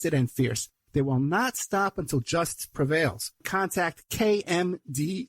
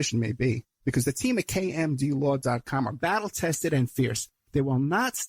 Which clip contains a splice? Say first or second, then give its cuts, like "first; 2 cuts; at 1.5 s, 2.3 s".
first; 1 cut; at 3.4 s